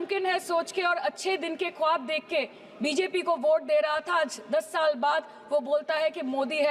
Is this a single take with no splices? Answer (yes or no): yes